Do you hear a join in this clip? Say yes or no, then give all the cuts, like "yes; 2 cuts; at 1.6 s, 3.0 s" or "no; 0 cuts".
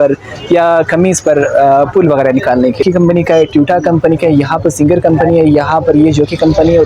yes; 1 cut; at 2.8 s